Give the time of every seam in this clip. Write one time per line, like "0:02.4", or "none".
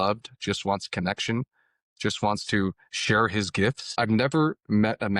0:03.8